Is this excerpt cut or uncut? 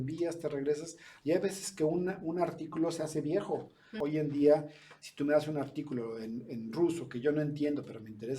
cut